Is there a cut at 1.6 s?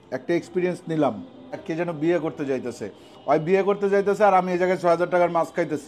yes; 1 cut; at 1.6 s

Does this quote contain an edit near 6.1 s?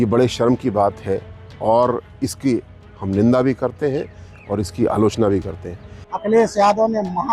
yes; 1 cut; at 6.1 s

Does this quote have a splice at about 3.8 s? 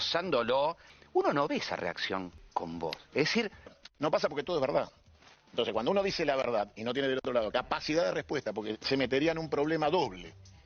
yes; 3 cuts; at 0.9 s, 2.4 s, 3.8 s

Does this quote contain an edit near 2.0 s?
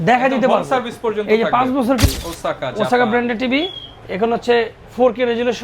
yes; 1 cut; at 2.0 s

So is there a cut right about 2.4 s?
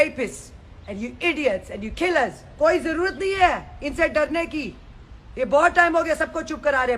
yes; 1 cut; at 2.4 s

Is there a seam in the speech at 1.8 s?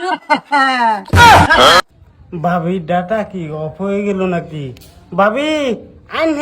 yes; 1 cut; at 1.8 s

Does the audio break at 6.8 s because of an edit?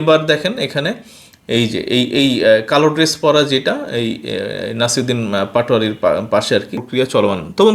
yes; 1 cut; at 6.8 s

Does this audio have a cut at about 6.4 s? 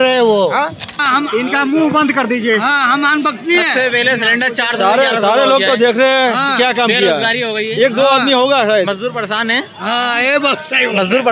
no; 1 cut; at 0.9 s

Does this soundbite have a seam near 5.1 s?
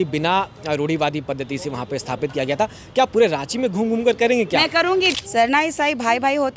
yes; 1 cut; at 5.1 s

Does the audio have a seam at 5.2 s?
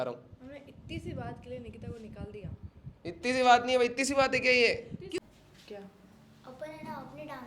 yes; 1 cut; at 5.2 s

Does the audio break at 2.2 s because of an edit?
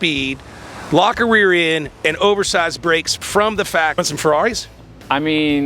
no; 1 cut; at 4.0 s

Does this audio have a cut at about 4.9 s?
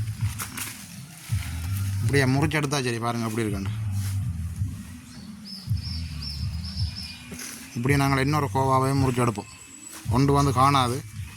no; 0 cuts

